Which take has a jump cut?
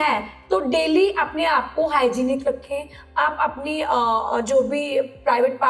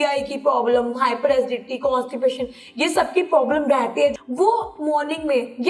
second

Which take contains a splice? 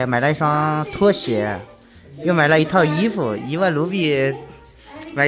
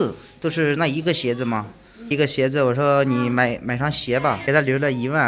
second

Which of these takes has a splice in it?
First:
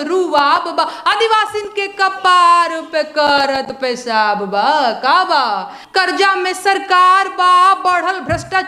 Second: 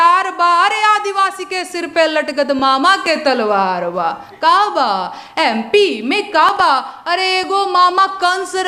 first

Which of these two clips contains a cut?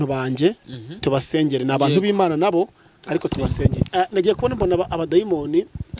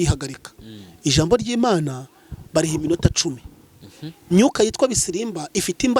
first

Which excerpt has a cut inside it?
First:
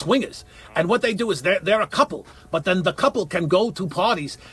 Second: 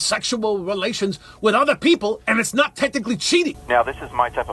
second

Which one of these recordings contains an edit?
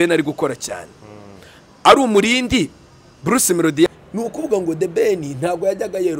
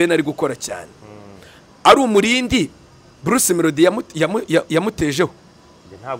first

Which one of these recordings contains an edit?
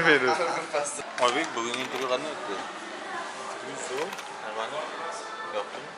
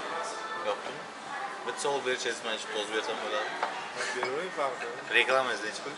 first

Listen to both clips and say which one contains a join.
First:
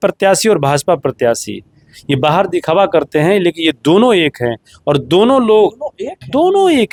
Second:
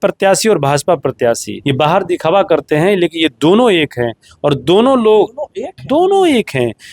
second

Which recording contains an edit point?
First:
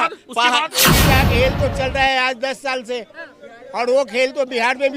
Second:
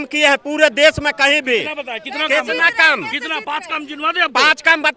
first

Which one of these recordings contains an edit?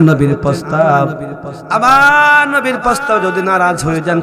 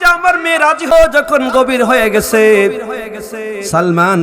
second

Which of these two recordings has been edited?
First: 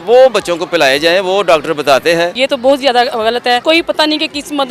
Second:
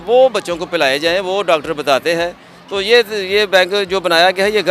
first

